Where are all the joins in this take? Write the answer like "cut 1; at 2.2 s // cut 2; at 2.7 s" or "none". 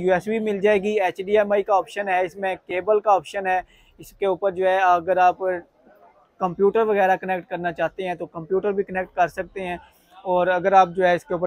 none